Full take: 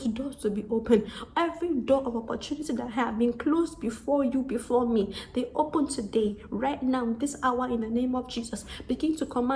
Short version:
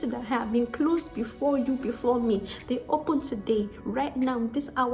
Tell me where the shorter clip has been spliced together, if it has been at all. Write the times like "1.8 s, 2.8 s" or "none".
none